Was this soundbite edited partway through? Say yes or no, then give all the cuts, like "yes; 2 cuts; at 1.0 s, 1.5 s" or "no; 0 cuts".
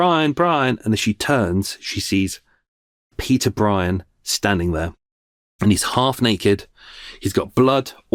no; 0 cuts